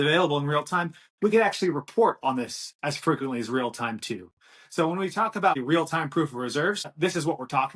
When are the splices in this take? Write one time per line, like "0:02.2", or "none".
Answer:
0:05.6
0:06.9